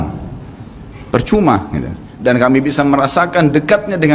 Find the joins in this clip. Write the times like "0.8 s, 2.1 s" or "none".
2.0 s